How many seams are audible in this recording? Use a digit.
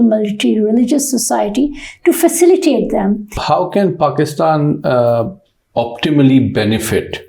1